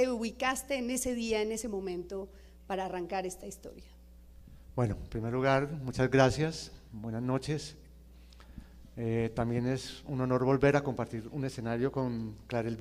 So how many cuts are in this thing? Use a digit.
1